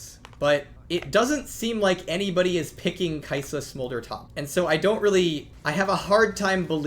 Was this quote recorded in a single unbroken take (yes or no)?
no